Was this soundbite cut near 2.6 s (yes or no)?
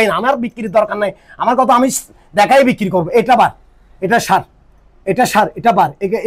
no